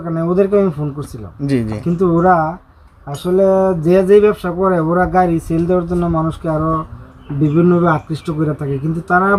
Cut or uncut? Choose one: uncut